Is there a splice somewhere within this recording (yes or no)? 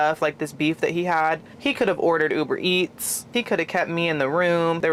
no